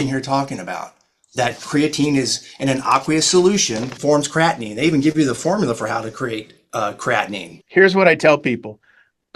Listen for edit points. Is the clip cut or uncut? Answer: cut